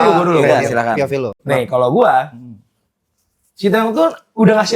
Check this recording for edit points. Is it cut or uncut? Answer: uncut